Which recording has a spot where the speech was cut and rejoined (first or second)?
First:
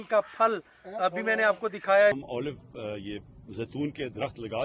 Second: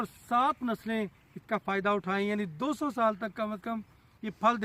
first